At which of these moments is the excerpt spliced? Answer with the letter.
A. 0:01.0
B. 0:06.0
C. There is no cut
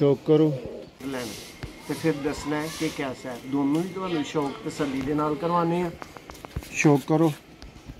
A